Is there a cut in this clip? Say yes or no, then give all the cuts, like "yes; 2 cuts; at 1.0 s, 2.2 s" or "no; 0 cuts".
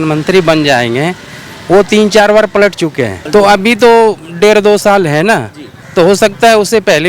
yes; 1 cut; at 3.1 s